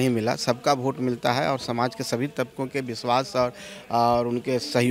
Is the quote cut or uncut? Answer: uncut